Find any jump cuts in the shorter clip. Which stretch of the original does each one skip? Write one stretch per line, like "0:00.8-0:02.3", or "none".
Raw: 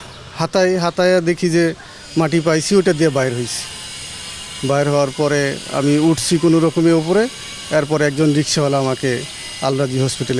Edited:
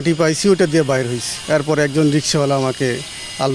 0:03.5-0:07.5